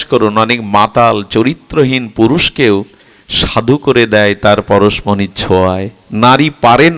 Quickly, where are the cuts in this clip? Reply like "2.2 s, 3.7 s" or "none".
none